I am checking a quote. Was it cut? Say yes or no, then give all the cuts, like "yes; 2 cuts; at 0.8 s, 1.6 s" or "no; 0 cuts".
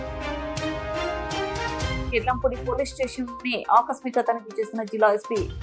no; 0 cuts